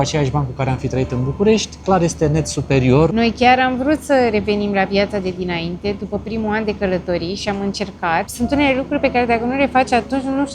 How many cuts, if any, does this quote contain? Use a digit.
2